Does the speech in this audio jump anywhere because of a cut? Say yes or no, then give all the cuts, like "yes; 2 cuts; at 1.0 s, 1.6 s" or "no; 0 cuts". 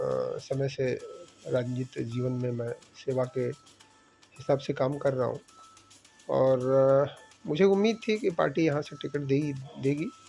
no; 0 cuts